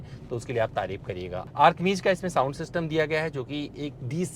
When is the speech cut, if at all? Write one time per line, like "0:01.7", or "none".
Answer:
none